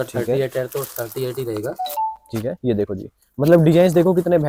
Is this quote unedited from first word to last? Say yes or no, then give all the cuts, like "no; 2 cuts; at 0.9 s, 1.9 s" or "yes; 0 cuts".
yes; 0 cuts